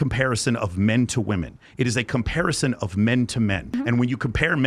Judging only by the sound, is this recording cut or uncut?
cut